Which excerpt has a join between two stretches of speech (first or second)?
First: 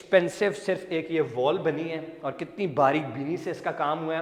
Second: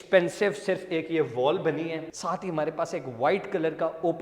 second